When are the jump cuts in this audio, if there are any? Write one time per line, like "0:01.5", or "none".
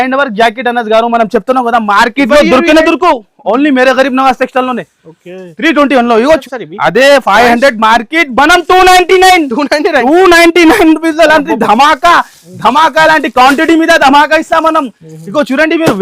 0:06.4